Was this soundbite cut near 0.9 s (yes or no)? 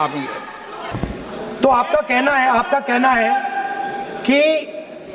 yes